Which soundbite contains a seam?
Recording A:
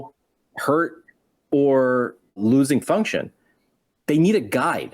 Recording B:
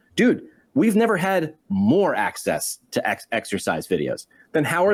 A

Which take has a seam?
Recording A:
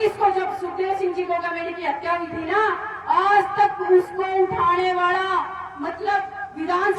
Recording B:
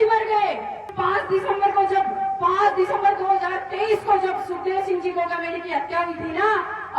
B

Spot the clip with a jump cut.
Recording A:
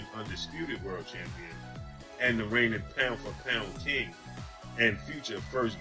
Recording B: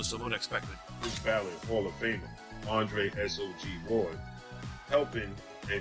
B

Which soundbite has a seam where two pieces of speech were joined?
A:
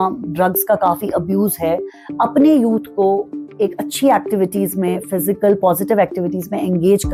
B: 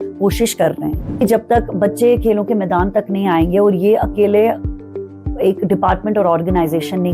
B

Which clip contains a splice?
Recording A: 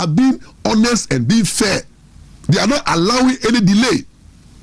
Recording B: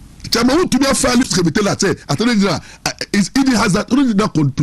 B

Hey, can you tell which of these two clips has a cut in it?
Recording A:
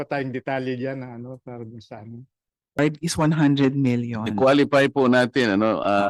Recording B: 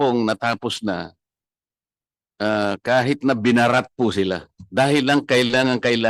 A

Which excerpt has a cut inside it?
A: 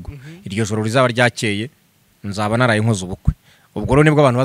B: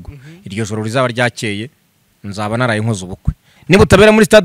B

